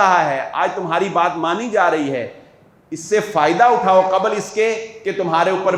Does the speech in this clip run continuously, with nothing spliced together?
yes; 0 cuts

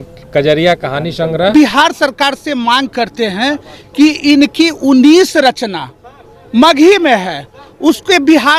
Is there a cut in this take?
yes; 1 cut; at 1.5 s

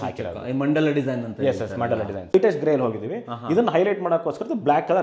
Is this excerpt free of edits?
no; 1 cut; at 2.3 s

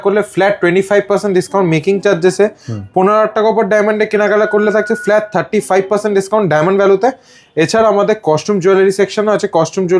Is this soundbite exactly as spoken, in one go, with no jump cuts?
yes; 0 cuts

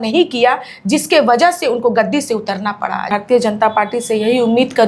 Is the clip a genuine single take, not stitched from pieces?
no; 1 cut; at 3.1 s

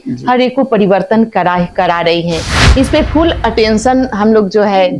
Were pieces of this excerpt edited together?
yes; 1 cut; at 2.5 s

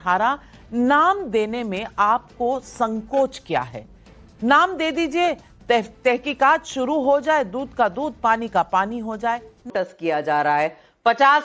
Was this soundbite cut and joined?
yes; 1 cut; at 9.7 s

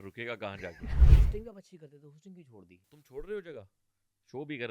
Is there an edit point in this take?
yes; 2 cuts; at 1.1 s, 3.0 s

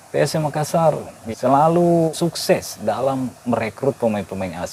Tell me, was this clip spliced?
yes; 2 cuts; at 1.3 s, 2.1 s

